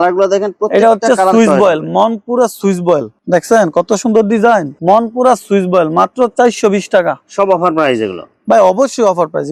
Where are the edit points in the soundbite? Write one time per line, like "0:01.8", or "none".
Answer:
none